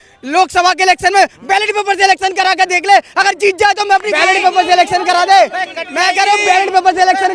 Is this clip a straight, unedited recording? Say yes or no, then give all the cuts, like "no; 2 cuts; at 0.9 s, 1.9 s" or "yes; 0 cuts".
yes; 0 cuts